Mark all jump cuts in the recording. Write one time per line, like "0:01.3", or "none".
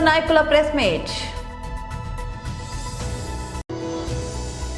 0:01.3